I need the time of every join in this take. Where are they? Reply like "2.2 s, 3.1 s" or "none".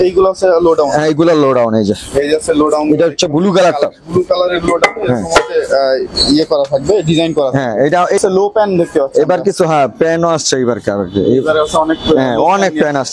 8.2 s